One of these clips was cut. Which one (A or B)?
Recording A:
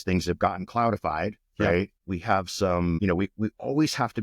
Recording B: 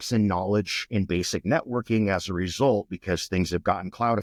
A